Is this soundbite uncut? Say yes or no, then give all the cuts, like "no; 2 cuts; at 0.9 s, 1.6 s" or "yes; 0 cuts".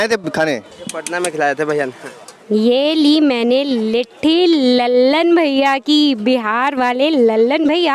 no; 1 cut; at 2.4 s